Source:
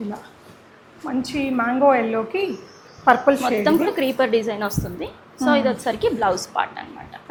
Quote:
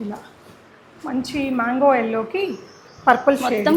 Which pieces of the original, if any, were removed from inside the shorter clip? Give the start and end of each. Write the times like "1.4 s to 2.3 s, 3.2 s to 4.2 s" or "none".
none